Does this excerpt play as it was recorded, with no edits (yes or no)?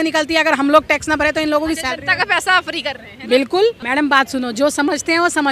no